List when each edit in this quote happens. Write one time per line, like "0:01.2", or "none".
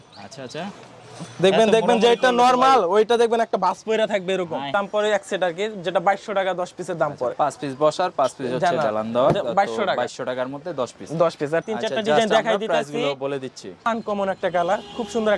0:04.7
0:11.6
0:13.9